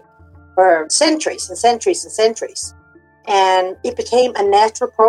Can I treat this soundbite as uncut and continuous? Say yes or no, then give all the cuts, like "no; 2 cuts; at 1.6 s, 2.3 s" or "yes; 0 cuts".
no; 2 cuts; at 0.9 s, 3.8 s